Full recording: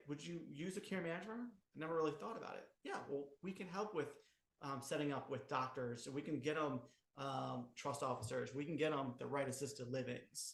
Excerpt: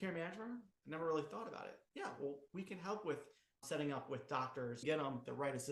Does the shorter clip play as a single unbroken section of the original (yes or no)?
no